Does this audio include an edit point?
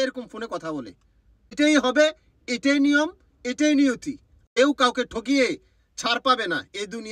yes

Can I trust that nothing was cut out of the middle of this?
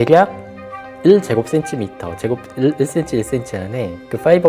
yes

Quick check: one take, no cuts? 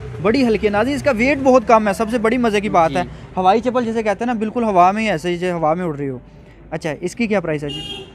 yes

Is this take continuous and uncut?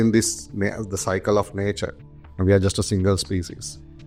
yes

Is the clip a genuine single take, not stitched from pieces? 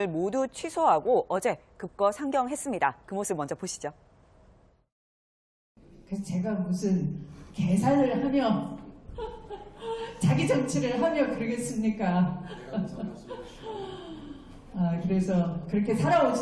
no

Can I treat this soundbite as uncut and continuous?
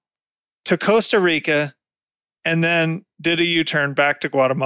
yes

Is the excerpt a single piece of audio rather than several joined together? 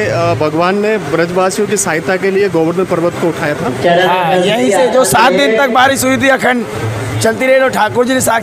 yes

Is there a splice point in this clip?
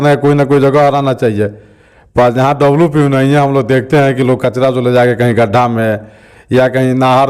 no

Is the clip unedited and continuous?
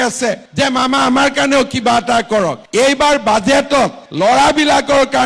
yes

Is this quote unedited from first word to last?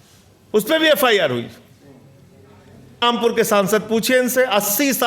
no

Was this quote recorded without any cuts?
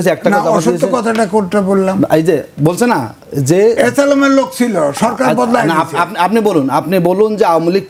yes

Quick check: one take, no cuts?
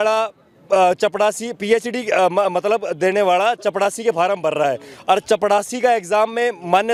yes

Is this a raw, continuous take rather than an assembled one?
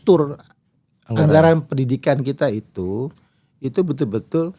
yes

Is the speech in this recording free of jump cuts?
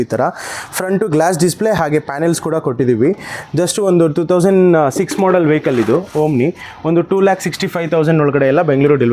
yes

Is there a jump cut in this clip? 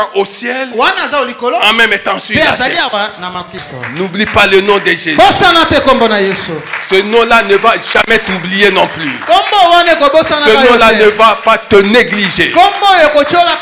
yes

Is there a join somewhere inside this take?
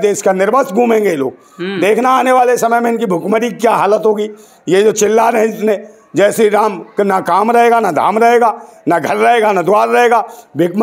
no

